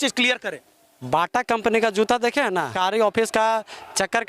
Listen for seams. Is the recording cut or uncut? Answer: cut